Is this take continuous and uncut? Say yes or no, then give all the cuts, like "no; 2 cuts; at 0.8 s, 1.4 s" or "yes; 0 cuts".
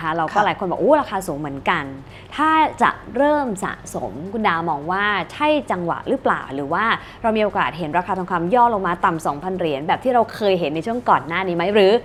yes; 0 cuts